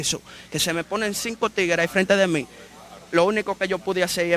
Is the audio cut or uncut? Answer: uncut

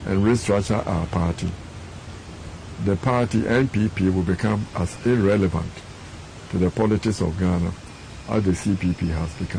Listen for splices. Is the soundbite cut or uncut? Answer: uncut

